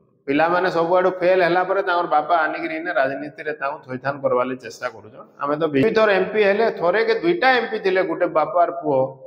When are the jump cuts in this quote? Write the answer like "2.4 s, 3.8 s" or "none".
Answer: 5.8 s